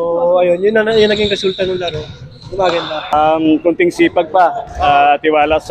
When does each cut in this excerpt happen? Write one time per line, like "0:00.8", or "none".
0:03.1